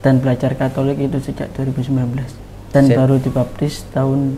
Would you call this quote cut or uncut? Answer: cut